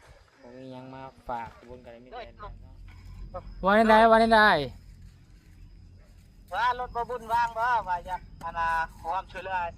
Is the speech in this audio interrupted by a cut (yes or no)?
yes